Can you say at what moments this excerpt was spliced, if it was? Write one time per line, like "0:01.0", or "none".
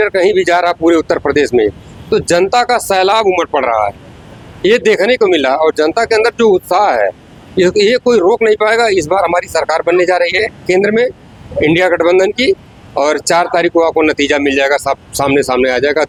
none